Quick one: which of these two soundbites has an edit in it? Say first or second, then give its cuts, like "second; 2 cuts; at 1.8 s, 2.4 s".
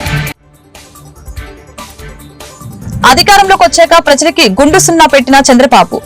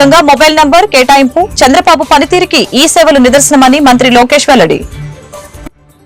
first; 1 cut; at 1.8 s